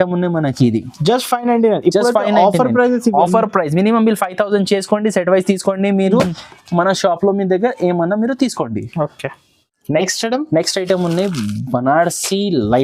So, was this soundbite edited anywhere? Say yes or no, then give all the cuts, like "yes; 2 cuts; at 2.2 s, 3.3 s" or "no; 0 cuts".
no; 0 cuts